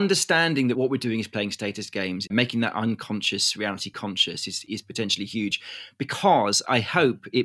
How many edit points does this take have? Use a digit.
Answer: 3